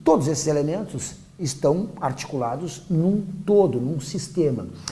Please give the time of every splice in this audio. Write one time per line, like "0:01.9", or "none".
0:03.7